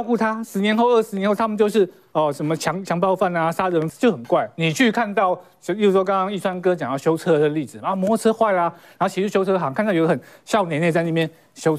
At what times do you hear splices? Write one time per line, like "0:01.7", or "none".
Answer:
0:03.9